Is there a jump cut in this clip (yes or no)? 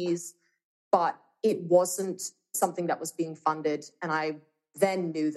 yes